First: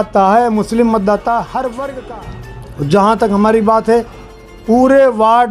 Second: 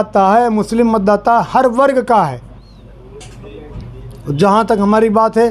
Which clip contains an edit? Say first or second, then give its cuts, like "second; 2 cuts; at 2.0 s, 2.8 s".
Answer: first; 1 cut; at 2.0 s